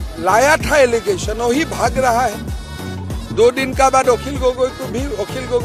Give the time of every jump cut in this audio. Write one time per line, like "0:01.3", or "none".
none

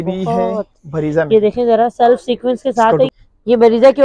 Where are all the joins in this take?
0:03.1

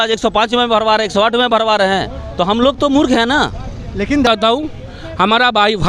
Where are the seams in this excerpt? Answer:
0:04.3

